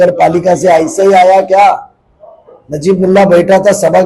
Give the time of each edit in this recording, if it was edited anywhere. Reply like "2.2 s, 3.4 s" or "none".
none